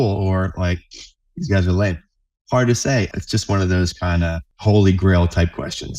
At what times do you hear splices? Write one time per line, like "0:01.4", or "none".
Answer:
0:03.1
0:04.5

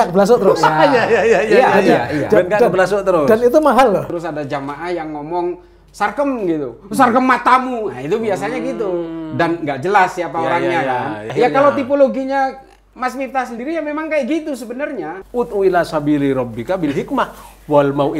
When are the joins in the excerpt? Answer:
0:04.1
0:11.3
0:15.2

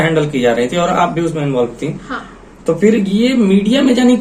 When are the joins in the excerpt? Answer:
none

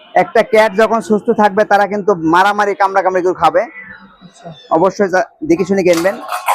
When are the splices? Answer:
none

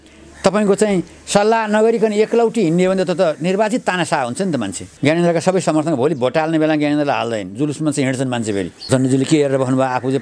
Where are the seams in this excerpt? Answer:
0:04.8
0:08.9

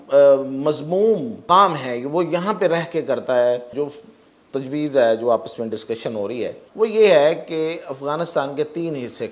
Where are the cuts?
0:01.4
0:03.7
0:06.6

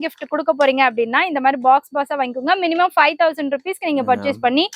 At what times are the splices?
none

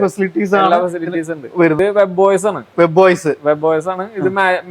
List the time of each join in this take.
0:01.8

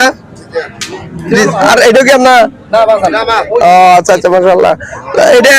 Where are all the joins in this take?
0:01.6

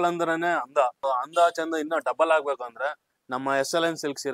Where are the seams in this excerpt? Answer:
0:01.0

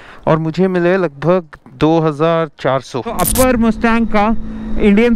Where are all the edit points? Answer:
0:03.1

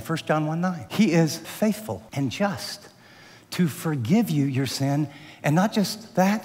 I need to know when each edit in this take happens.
0:00.8
0:01.4

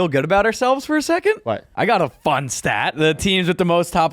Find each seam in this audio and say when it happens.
0:01.7
0:03.0

